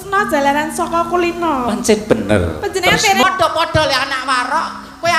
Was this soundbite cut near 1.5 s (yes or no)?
no